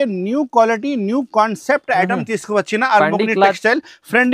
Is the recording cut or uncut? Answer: uncut